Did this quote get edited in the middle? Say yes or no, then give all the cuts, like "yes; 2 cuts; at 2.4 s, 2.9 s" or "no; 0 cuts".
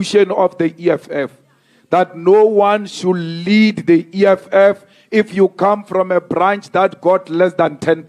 no; 0 cuts